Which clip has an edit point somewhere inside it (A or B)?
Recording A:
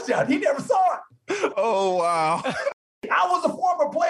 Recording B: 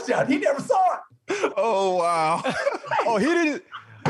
A